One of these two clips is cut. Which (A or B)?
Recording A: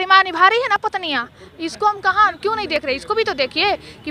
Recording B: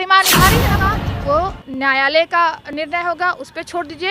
B